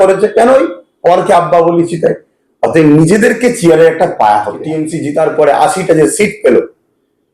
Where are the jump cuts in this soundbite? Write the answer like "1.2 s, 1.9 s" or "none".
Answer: 4.9 s